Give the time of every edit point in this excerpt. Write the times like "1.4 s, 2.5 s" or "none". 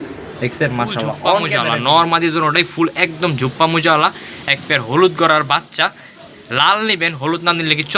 1.6 s